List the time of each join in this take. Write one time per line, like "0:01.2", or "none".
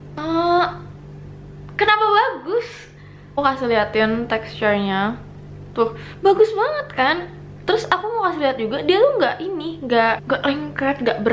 0:03.4
0:10.2